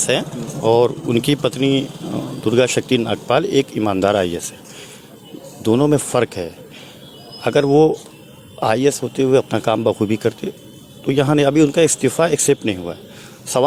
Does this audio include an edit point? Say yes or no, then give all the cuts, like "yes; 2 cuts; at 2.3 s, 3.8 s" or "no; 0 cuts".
no; 0 cuts